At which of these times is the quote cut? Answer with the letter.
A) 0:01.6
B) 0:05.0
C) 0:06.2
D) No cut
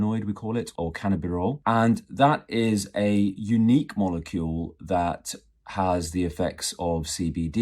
A